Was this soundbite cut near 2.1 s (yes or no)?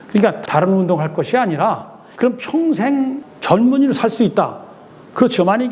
yes